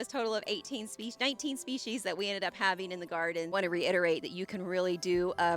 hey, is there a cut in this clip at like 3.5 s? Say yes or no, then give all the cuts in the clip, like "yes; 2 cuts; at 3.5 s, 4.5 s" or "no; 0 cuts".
yes; 1 cut; at 3.5 s